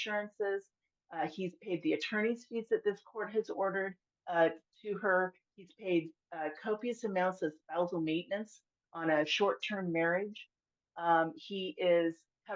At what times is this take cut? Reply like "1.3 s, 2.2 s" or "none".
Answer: none